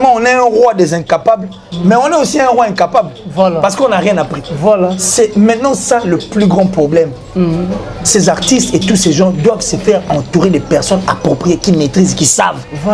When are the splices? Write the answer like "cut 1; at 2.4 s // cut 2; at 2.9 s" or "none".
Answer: none